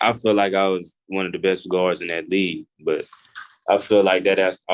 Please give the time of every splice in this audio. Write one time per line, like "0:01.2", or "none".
0:02.7